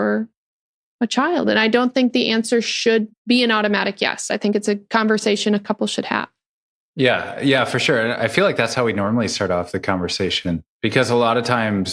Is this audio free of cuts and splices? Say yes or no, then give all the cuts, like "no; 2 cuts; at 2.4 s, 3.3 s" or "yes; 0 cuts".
no; 2 cuts; at 3.1 s, 10.7 s